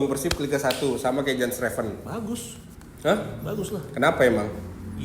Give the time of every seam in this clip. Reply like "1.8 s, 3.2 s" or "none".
none